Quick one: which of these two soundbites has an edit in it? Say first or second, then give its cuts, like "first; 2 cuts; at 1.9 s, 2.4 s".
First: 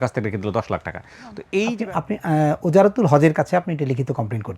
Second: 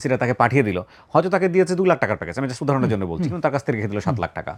first; 1 cut; at 1.3 s